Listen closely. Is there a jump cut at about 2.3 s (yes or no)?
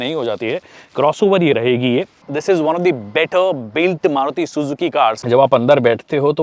yes